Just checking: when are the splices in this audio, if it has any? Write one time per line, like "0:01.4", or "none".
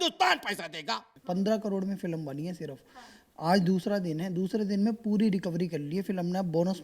0:01.1